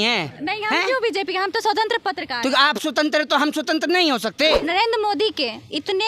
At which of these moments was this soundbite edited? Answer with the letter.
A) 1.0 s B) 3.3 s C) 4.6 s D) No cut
C